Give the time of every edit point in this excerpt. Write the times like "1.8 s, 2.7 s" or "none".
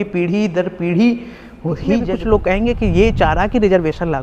2.0 s